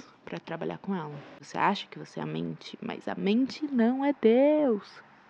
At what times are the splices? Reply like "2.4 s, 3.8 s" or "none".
1.3 s